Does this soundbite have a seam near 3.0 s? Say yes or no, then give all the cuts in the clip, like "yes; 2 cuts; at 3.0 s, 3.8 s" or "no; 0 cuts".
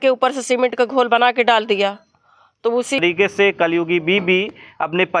yes; 1 cut; at 3.0 s